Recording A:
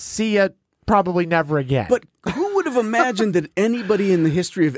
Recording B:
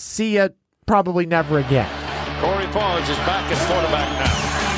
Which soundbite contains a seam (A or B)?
B